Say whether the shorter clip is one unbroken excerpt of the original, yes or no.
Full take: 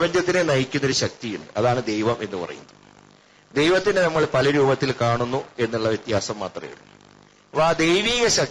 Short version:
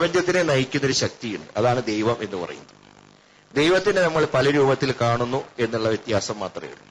yes